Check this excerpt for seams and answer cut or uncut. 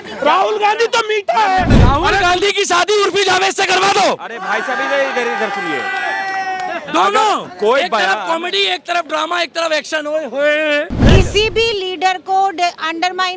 cut